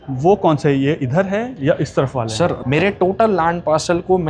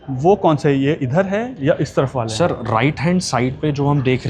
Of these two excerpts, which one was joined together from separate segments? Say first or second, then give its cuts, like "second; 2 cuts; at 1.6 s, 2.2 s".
first; 1 cut; at 2.6 s